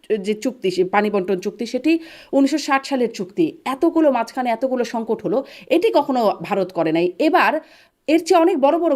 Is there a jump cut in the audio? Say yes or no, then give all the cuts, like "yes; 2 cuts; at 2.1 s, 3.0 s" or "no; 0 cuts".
no; 0 cuts